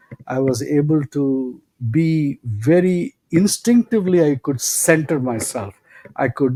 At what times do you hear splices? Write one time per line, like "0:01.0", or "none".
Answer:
none